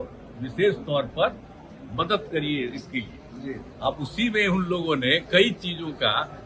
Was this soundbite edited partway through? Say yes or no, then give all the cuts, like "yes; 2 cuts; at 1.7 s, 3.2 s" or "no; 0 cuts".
no; 0 cuts